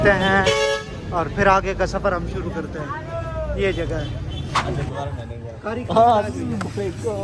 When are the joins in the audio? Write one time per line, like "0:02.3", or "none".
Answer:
0:04.6

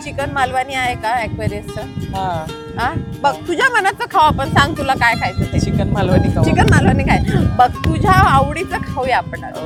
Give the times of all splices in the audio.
none

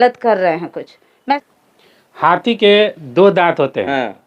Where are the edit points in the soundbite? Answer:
0:01.3

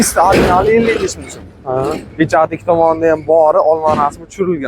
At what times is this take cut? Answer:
none

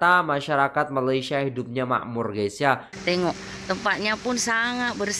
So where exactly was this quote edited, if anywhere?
0:02.9

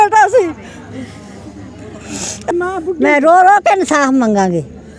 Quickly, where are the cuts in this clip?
0:02.5

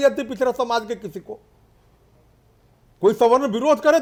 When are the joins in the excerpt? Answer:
none

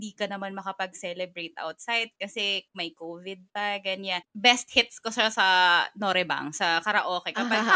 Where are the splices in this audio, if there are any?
0:04.3

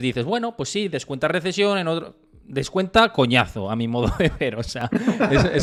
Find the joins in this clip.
none

